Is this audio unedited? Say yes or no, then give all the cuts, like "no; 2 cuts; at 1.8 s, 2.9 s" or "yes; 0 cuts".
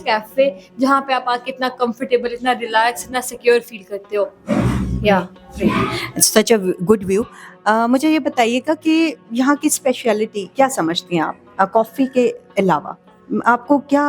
yes; 0 cuts